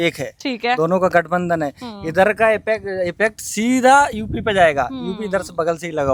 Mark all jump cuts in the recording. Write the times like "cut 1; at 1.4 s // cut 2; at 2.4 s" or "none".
none